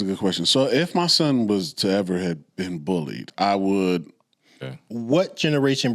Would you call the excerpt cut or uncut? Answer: cut